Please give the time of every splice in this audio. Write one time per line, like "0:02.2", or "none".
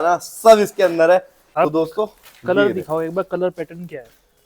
0:01.4